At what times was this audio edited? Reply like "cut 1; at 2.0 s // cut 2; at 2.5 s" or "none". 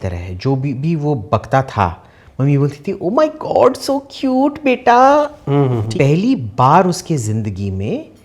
cut 1; at 5.9 s